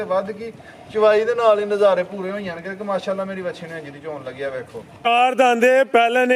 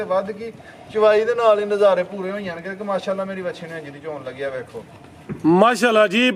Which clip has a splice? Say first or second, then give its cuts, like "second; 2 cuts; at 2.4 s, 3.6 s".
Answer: first; 1 cut; at 5.1 s